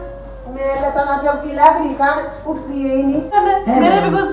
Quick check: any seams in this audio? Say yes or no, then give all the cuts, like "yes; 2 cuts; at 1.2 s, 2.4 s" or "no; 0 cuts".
yes; 1 cut; at 3.3 s